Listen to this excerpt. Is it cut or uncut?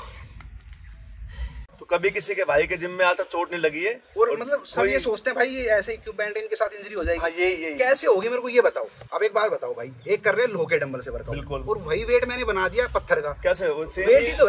cut